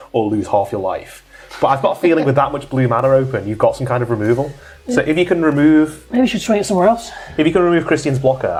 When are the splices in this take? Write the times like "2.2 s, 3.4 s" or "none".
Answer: none